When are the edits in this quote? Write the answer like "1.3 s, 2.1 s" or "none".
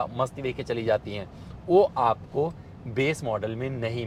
none